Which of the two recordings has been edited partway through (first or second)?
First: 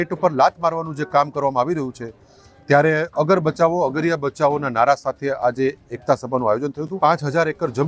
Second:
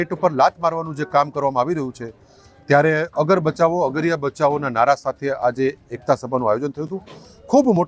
first